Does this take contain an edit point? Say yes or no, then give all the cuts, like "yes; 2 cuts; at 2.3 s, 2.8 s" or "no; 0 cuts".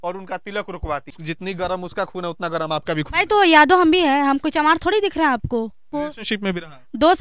yes; 2 cuts; at 1.1 s, 5.9 s